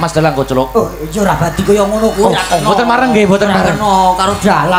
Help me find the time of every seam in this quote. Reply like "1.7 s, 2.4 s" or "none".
none